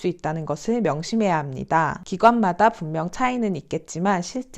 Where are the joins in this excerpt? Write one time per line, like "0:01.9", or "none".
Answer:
none